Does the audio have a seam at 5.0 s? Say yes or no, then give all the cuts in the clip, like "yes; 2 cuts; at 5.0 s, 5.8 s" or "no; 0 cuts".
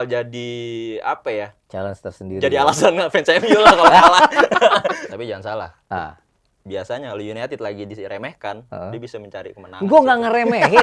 yes; 1 cut; at 5.0 s